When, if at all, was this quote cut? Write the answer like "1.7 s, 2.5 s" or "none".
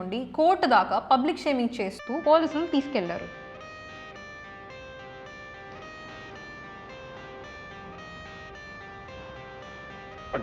3.3 s